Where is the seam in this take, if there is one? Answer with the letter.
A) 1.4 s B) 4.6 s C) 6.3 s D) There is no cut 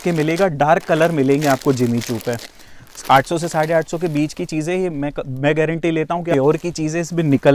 C